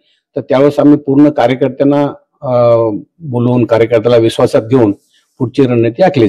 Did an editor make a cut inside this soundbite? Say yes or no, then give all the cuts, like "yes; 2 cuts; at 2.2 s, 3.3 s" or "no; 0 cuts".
no; 0 cuts